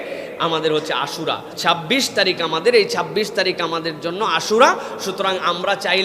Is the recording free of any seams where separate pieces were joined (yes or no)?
no